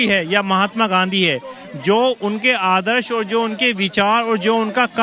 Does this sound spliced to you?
no; 0 cuts

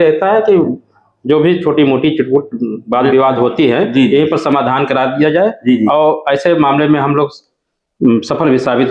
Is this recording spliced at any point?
no; 0 cuts

